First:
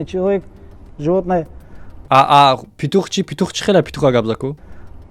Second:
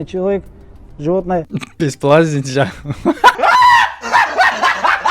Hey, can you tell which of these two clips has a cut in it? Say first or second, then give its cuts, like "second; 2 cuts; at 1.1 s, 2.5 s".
second; 1 cut; at 1.4 s